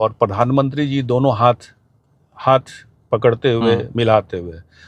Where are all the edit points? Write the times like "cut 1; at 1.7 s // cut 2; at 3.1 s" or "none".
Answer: none